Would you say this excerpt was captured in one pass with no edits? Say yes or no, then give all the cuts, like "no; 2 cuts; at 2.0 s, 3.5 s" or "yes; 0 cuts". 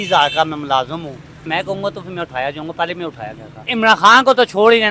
no; 2 cuts; at 1.5 s, 3.6 s